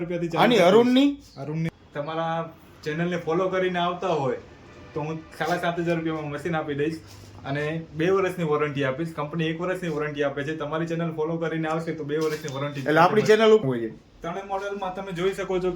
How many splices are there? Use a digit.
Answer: 2